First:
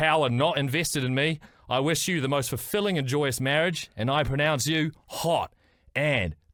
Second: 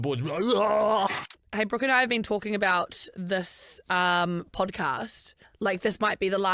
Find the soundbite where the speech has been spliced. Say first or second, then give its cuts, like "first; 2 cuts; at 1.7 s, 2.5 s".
second; 2 cuts; at 1.4 s, 5.5 s